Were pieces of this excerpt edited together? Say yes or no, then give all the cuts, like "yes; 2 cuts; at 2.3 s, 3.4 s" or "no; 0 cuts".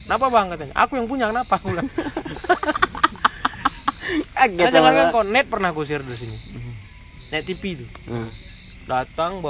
no; 0 cuts